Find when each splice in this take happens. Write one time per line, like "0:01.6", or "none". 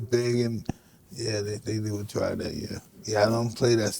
0:03.0